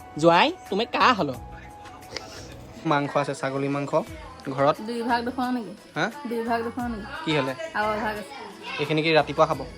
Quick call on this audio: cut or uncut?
cut